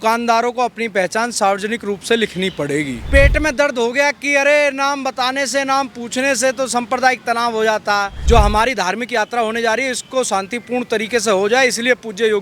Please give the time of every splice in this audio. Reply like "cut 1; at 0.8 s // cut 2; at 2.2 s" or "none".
cut 1; at 3.1 s // cut 2; at 8.2 s